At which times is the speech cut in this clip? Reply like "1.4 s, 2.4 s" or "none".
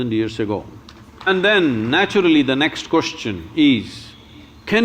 1.3 s